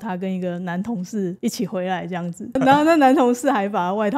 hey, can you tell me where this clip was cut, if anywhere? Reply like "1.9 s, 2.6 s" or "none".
1.4 s, 2.6 s